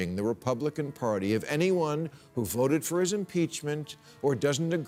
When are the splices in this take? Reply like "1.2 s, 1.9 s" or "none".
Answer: none

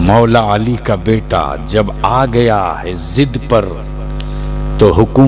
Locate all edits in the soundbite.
none

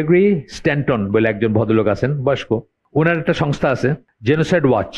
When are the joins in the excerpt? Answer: 2.8 s, 4.1 s

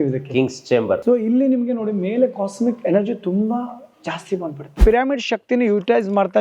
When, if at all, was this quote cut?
1.0 s, 4.8 s

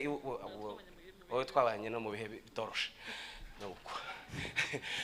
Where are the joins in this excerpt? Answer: none

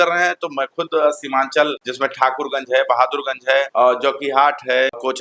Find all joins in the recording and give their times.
none

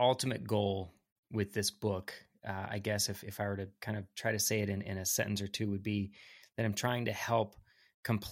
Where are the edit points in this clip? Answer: none

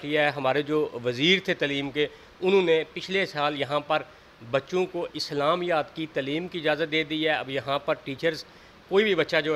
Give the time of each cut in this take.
none

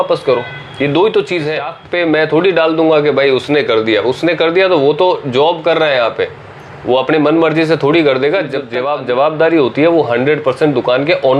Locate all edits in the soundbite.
1.8 s, 8.7 s

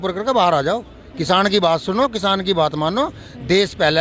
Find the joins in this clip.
none

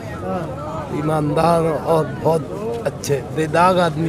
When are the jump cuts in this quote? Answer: none

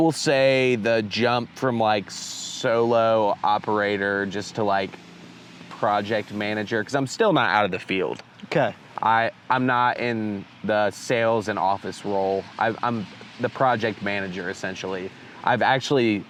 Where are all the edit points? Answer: none

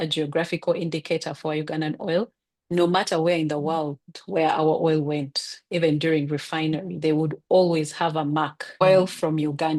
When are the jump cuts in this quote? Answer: 8.8 s

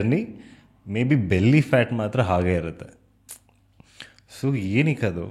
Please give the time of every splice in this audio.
none

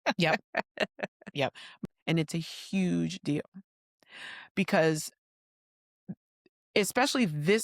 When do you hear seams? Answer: 1.7 s

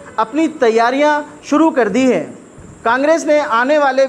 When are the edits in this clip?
none

